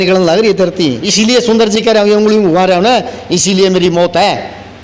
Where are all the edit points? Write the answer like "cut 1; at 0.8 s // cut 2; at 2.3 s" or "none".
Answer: cut 1; at 1.0 s